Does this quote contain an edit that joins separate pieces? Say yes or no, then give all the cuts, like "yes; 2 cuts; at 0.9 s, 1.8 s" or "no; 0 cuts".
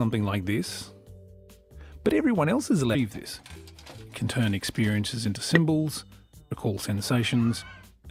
no; 0 cuts